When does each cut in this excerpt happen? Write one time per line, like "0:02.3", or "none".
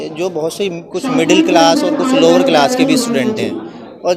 none